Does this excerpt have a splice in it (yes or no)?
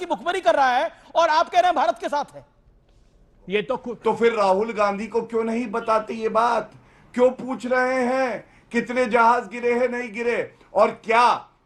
yes